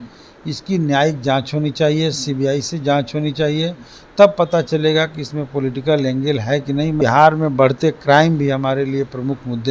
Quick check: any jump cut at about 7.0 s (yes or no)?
yes